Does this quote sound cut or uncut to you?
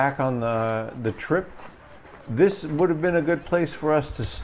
uncut